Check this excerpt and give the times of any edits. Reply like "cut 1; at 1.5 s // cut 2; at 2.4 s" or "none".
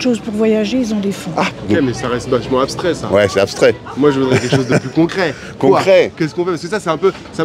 cut 1; at 1.5 s